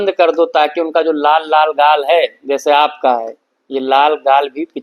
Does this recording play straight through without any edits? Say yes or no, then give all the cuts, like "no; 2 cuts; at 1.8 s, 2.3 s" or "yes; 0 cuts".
yes; 0 cuts